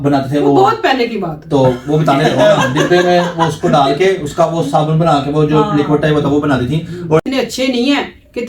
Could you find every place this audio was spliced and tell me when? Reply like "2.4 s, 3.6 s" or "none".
7.2 s